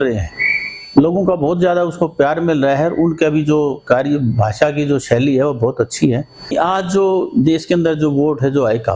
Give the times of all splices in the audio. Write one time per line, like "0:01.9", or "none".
0:06.5